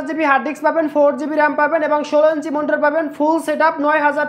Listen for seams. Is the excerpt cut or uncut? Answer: uncut